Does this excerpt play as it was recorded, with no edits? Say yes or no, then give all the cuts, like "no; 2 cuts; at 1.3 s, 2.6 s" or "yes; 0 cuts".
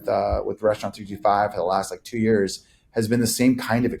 yes; 0 cuts